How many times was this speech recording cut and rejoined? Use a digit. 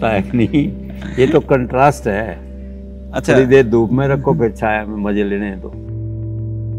1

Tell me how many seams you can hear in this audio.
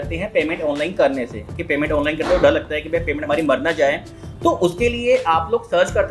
0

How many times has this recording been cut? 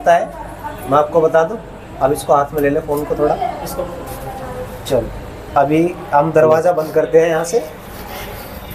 0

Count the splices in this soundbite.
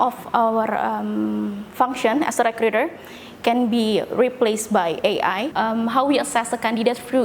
1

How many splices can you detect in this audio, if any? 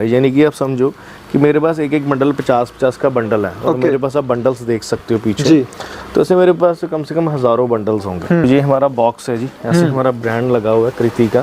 1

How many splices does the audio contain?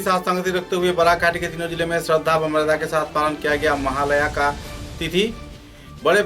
0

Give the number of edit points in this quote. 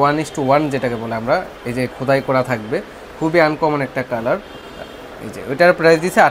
0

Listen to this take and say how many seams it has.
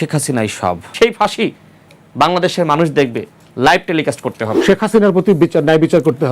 2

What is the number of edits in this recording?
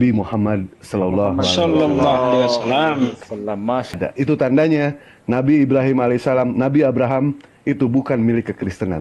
1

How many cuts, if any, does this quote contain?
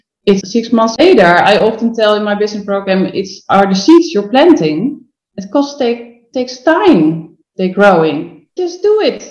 1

